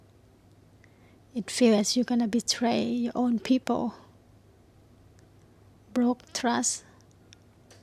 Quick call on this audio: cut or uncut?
uncut